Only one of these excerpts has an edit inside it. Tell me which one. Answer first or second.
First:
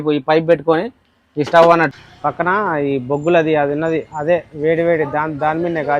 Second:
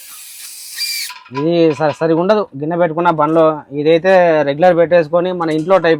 first